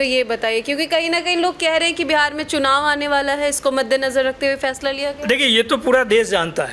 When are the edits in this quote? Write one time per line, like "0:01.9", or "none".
none